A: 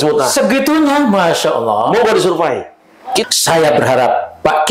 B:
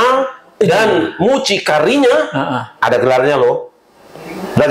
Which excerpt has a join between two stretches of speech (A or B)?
A